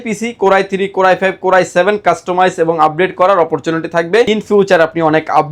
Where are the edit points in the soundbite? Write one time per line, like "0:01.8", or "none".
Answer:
none